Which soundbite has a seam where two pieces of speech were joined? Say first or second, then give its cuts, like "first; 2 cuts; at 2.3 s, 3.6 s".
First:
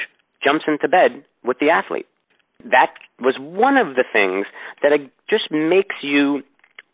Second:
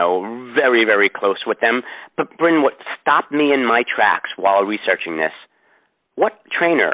first; 1 cut; at 2.6 s